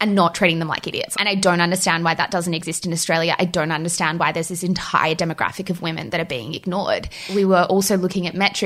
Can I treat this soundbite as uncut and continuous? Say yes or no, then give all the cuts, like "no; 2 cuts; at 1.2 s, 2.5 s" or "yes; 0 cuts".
no; 2 cuts; at 1.0 s, 7.3 s